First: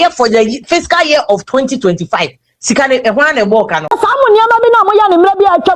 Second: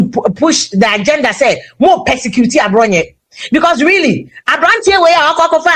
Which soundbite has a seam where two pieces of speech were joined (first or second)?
first